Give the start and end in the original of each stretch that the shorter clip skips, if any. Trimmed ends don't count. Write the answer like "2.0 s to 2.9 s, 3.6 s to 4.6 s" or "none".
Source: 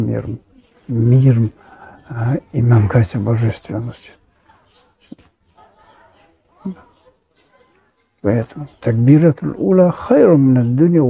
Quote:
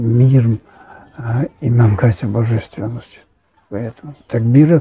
4.7 s to 8.3 s